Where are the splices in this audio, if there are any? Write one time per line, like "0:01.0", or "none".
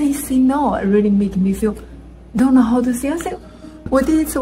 none